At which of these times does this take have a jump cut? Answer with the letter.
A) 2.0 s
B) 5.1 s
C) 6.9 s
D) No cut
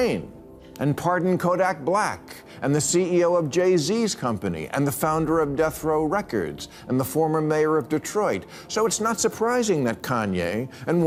D